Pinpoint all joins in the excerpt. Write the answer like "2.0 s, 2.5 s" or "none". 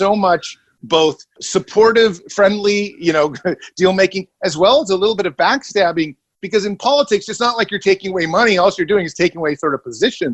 1.0 s